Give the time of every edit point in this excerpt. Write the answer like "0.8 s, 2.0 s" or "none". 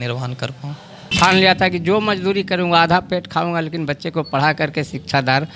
1.1 s